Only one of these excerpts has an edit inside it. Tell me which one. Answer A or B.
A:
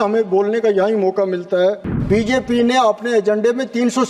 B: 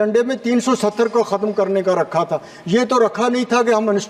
A